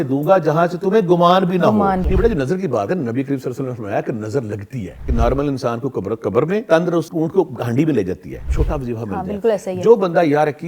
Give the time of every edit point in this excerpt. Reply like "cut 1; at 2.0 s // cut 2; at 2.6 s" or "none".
cut 1; at 2.1 s // cut 2; at 5.0 s // cut 3; at 6.8 s // cut 4; at 8.5 s